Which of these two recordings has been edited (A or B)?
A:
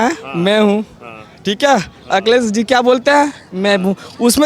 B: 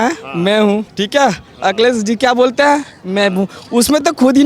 B